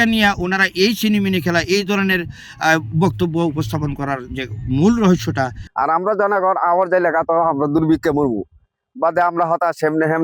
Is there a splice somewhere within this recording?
yes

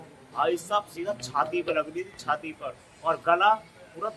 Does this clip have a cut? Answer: no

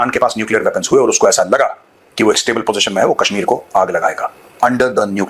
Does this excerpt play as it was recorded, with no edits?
yes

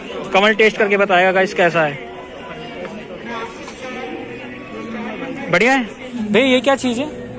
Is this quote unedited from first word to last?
no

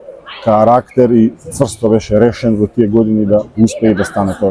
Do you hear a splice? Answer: no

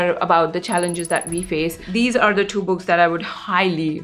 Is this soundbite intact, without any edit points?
no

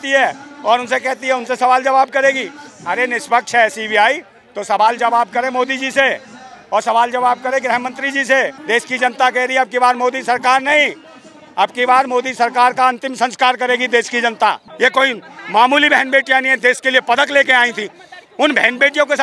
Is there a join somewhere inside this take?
yes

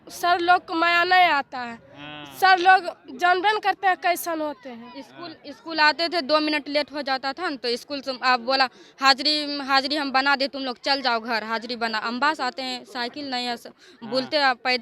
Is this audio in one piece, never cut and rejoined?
yes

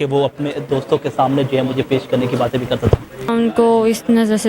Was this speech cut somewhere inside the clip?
yes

